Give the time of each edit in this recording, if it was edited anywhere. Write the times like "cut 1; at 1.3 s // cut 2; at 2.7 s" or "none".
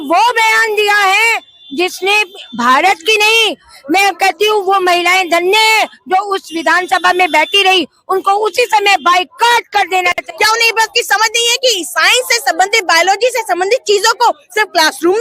cut 1; at 10.2 s